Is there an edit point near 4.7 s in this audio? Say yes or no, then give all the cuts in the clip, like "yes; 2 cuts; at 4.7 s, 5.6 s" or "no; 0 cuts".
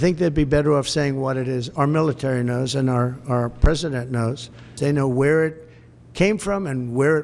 yes; 1 cut; at 4.7 s